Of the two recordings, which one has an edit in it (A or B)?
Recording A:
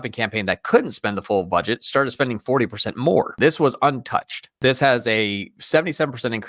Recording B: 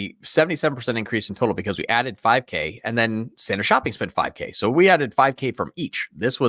A